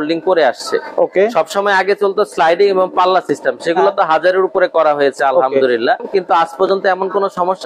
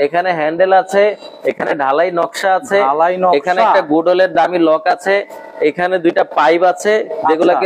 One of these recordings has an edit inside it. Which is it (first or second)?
first